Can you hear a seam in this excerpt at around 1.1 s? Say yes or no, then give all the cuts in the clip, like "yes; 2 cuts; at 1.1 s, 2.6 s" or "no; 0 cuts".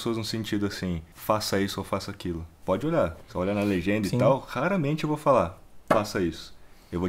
yes; 3 cuts; at 1.1 s, 2.5 s, 5.7 s